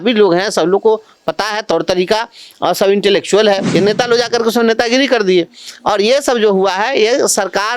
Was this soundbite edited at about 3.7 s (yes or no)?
yes